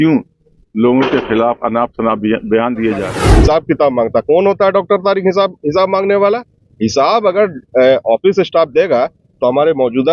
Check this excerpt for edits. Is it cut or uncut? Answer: cut